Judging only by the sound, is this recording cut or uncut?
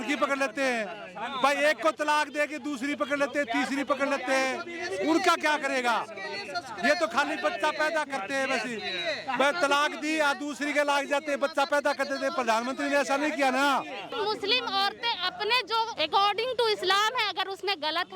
cut